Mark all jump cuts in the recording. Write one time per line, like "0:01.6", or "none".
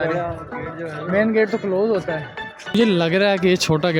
0:02.7